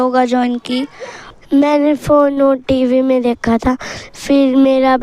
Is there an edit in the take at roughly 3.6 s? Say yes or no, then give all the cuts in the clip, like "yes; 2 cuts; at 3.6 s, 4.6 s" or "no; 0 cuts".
no; 1 cut; at 1.3 s